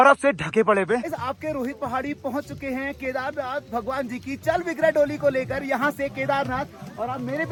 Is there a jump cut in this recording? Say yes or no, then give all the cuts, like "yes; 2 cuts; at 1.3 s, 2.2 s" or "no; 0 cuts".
no; 0 cuts